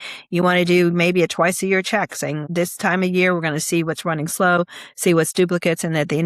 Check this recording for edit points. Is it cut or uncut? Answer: cut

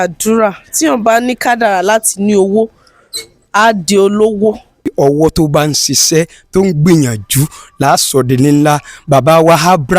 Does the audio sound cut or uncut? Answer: cut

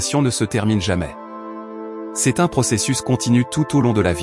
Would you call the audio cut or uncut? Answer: uncut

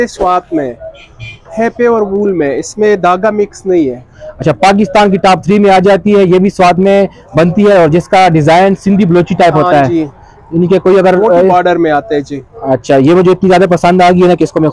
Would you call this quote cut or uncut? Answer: uncut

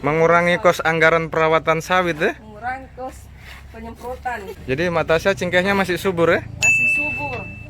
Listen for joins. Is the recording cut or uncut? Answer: cut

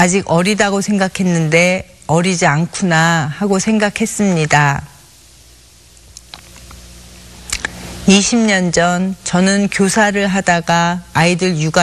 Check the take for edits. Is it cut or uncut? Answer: cut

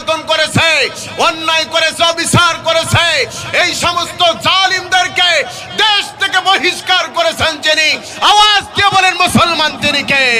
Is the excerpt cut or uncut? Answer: uncut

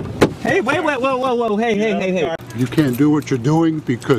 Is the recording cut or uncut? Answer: cut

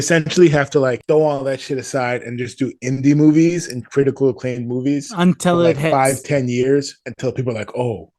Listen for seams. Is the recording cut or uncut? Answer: uncut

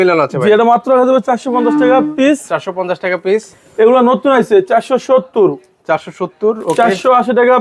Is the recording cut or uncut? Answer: uncut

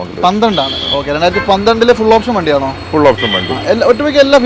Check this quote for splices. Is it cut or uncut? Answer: uncut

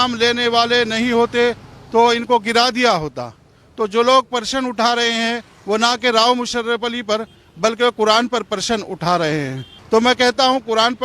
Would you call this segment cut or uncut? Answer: cut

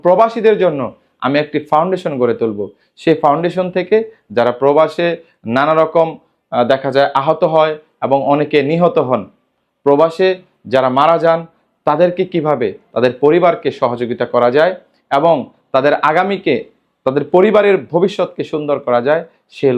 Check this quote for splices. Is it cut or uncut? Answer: uncut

